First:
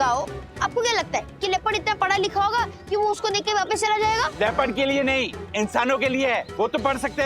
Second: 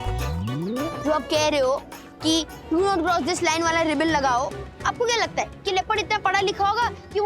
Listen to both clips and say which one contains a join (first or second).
first